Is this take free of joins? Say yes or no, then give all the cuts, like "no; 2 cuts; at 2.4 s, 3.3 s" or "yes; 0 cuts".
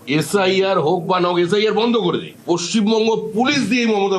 no; 1 cut; at 2.3 s